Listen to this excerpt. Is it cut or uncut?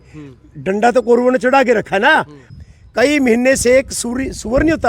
cut